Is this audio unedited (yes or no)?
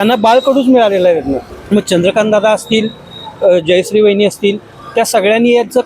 no